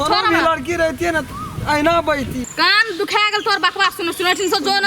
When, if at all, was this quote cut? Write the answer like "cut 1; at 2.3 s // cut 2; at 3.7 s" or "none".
cut 1; at 2.4 s